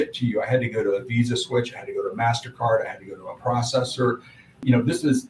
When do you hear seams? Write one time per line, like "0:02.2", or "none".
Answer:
none

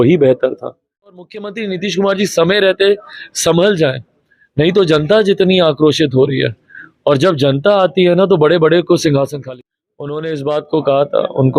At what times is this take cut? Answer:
0:01.2
0:09.4

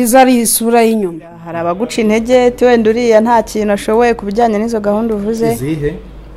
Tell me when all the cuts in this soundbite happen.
0:01.5

